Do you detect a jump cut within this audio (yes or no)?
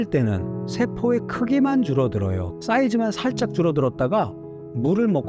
yes